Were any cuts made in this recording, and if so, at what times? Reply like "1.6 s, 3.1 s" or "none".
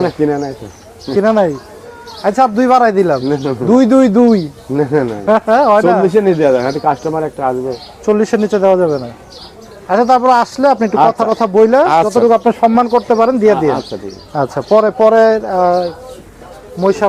none